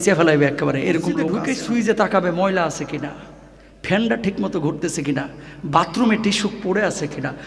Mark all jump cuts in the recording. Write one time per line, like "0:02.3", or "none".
0:01.4